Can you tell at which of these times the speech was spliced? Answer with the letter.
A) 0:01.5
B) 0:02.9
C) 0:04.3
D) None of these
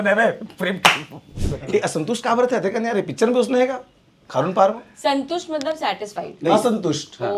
A